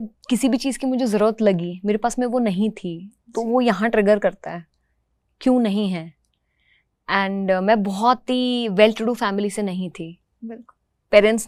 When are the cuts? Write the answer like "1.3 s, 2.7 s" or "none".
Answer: none